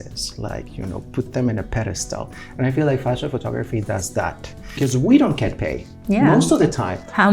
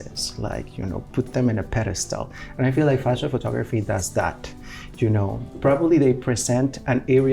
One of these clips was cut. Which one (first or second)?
first